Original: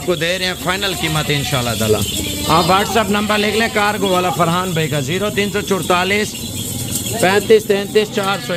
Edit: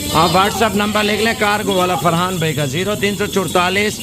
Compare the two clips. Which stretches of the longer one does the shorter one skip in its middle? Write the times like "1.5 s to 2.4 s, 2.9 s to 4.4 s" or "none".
none